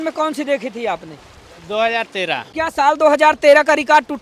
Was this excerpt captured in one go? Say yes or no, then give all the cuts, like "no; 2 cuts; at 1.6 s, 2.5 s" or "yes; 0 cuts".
no; 1 cut; at 2.5 s